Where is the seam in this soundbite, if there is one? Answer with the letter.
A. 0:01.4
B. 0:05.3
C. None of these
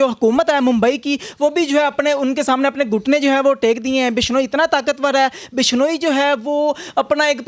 C